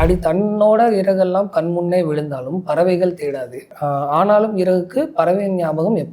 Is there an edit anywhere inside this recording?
no; 0 cuts

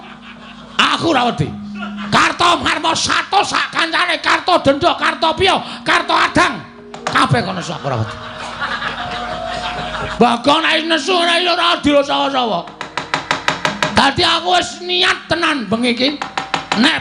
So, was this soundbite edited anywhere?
no; 0 cuts

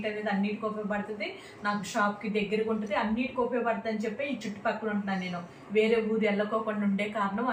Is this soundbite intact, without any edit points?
yes; 0 cuts

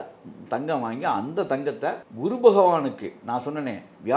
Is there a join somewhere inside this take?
yes; 1 cut; at 2.1 s

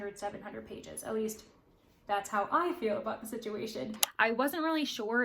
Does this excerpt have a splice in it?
yes; 1 cut; at 4.0 s

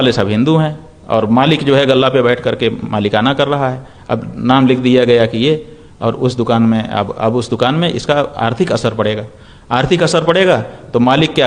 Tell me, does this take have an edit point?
no; 0 cuts

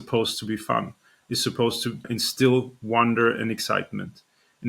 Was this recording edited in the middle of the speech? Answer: yes; 1 cut; at 2.1 s

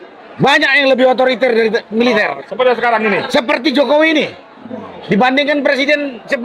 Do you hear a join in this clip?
no; 0 cuts

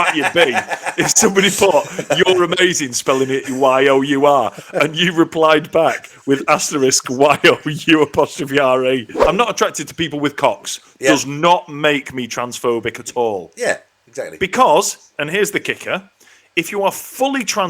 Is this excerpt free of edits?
no; 1 cut; at 9.1 s

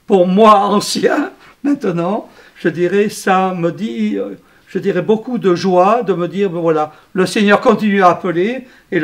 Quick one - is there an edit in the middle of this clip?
no; 0 cuts

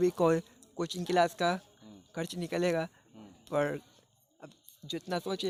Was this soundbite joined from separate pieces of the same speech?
no; 0 cuts

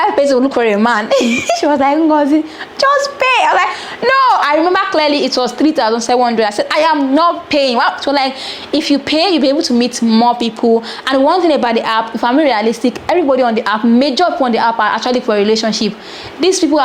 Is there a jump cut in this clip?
no; 0 cuts

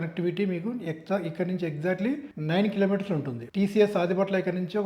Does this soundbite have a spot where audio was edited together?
no; 0 cuts

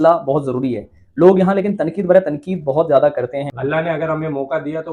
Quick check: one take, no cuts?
no; 1 cut; at 3.4 s

